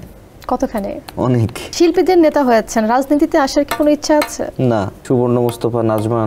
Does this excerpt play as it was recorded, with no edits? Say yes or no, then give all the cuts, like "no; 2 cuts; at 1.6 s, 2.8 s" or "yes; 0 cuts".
no; 2 cuts; at 1.6 s, 5.0 s